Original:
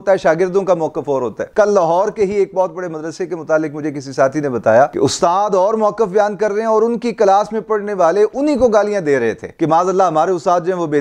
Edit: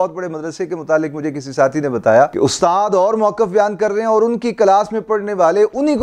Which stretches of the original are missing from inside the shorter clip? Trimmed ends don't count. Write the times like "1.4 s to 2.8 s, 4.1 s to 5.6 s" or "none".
none